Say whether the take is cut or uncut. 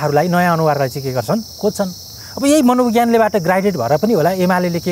uncut